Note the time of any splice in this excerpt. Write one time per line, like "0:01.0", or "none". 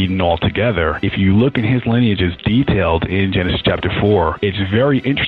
0:01.0
0:04.4

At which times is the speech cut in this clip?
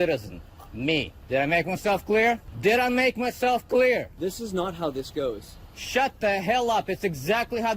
0:01.2
0:02.5
0:04.1

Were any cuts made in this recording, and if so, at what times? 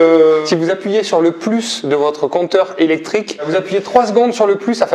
0:03.5

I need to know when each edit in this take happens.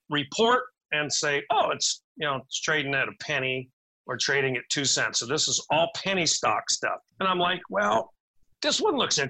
0:07.1

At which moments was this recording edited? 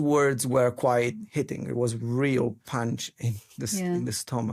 none

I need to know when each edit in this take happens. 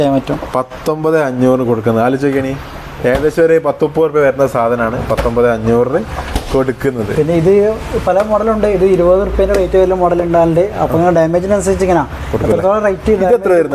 none

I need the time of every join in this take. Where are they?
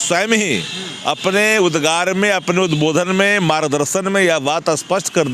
none

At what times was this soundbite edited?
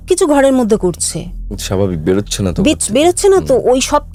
none

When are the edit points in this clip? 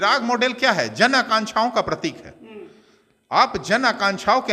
none

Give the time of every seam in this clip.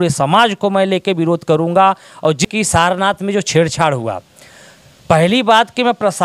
0:02.4

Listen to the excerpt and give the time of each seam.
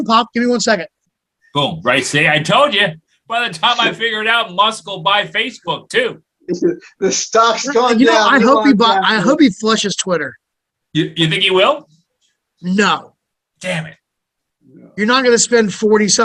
0:03.1

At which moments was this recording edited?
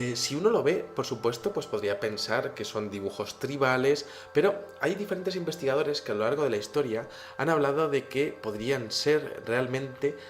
0:06.7

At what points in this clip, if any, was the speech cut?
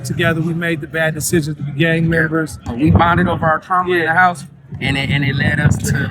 0:02.7

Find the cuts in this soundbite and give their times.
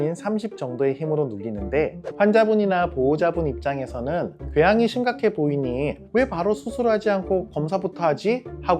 0:02.0

